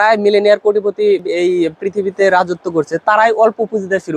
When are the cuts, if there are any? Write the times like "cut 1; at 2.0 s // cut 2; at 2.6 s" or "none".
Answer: cut 1; at 1.2 s